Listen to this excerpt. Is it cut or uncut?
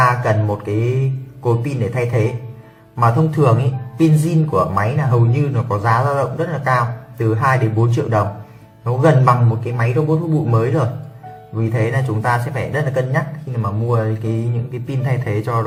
uncut